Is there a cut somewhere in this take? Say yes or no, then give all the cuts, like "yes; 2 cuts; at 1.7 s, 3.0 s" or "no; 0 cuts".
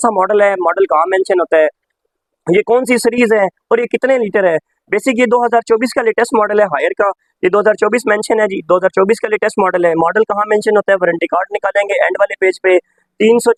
no; 0 cuts